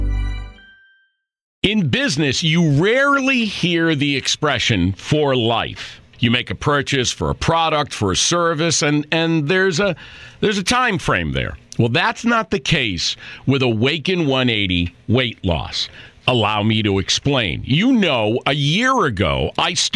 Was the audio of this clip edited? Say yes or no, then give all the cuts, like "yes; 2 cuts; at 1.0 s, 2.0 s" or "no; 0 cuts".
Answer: yes; 1 cut; at 1.5 s